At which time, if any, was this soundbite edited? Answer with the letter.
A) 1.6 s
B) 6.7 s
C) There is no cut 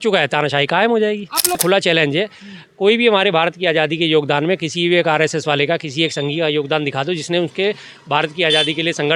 A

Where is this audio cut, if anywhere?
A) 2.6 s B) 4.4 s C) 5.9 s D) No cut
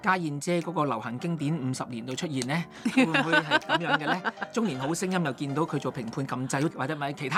D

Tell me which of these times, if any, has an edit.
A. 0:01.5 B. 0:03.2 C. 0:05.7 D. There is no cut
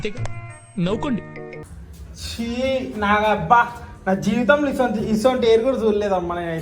A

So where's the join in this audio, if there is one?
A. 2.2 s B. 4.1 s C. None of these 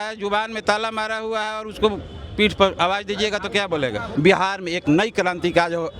B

